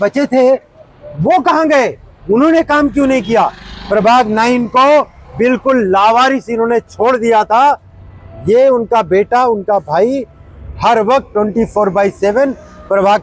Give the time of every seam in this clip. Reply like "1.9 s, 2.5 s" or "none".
none

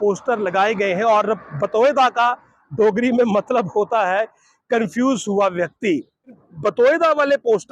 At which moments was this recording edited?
6.4 s

